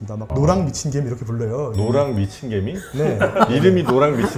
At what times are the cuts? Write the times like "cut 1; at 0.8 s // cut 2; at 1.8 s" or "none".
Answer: none